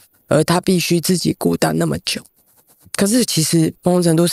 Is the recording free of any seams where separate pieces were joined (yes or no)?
no